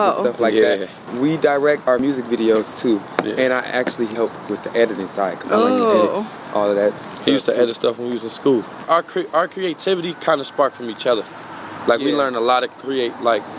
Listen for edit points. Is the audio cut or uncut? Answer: cut